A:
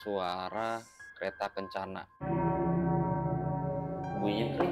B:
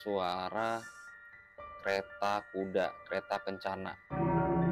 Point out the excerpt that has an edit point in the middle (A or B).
A